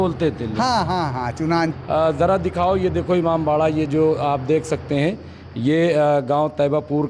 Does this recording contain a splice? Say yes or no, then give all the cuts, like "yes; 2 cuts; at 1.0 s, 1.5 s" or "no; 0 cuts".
yes; 1 cut; at 1.7 s